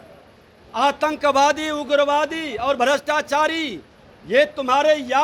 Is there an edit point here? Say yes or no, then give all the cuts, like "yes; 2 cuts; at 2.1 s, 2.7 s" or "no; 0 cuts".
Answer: no; 0 cuts